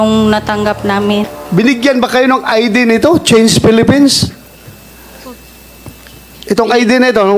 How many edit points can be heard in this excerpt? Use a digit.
1